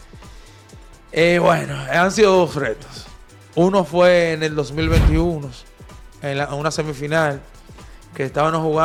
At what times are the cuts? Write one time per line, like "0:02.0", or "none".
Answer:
none